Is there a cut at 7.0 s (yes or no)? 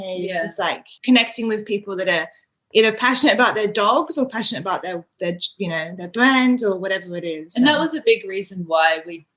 no